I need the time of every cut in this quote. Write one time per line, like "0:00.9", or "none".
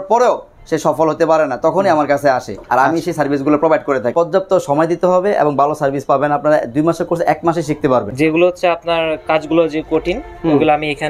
0:04.1
0:08.1